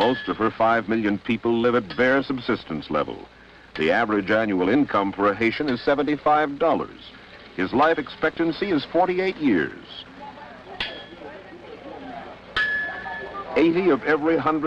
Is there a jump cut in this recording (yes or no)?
yes